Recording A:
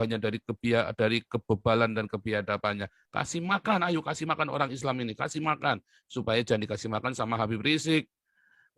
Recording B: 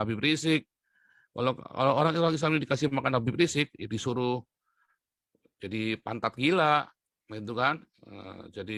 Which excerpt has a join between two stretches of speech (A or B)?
A